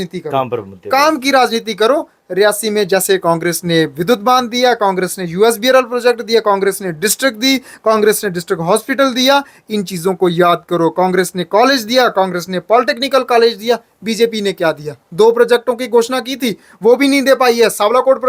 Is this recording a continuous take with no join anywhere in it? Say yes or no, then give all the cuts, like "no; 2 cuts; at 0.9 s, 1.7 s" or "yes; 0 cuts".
yes; 0 cuts